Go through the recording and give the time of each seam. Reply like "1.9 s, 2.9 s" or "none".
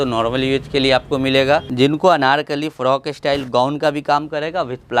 1.7 s